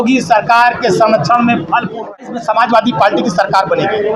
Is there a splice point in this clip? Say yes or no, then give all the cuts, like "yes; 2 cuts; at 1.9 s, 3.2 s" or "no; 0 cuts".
yes; 1 cut; at 2.3 s